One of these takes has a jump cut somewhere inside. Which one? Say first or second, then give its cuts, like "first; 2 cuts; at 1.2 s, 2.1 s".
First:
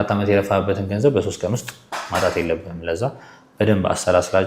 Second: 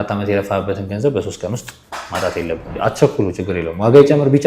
second; 1 cut; at 2.7 s